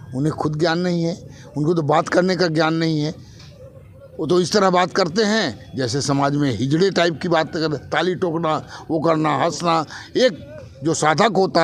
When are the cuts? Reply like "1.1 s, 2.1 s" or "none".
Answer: none